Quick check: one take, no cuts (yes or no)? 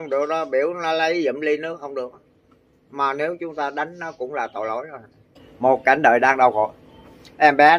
no